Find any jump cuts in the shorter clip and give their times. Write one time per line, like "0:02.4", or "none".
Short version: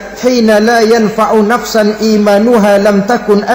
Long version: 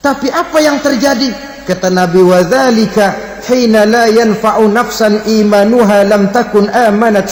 none